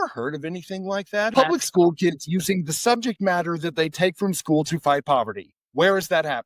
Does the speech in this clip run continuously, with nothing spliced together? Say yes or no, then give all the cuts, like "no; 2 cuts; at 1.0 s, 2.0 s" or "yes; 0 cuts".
no; 1 cut; at 1.3 s